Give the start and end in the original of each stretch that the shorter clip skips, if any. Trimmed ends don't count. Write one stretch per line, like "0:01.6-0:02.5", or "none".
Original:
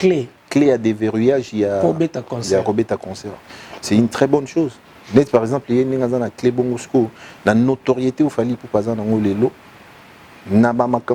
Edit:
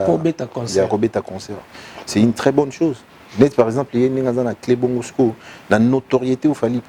none